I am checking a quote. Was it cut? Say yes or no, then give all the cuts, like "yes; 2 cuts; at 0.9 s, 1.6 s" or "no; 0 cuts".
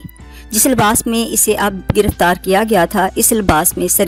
no; 0 cuts